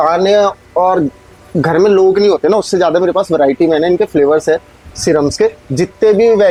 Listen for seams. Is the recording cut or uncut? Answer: uncut